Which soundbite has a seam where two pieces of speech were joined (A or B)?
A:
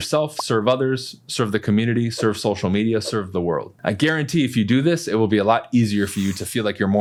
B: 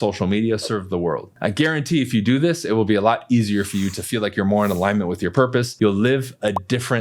B